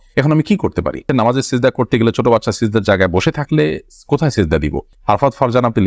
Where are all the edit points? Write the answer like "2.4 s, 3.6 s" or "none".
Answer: 1.0 s, 4.9 s